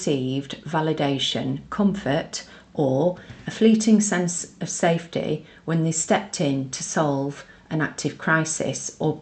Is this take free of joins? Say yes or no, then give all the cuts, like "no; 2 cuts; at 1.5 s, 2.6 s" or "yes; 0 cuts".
yes; 0 cuts